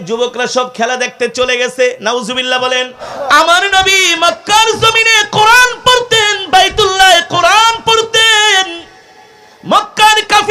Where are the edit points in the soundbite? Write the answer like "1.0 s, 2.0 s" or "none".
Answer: 3.1 s